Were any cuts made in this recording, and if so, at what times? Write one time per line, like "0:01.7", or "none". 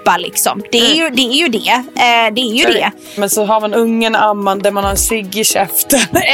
0:03.2